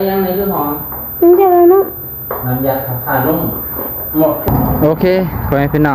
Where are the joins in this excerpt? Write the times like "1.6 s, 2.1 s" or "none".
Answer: 4.5 s